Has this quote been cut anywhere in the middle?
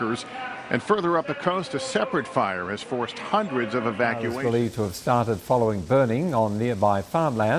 yes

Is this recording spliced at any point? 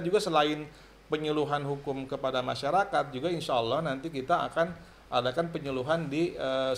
no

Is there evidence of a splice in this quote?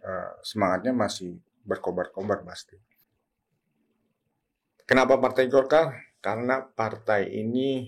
yes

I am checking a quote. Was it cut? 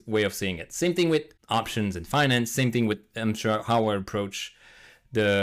yes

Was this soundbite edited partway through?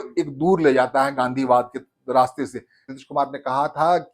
yes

